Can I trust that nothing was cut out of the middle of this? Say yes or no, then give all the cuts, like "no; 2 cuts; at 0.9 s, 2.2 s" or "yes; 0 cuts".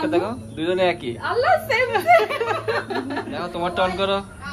no; 1 cut; at 3.5 s